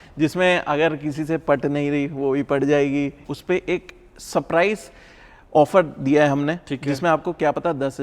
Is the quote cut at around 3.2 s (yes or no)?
yes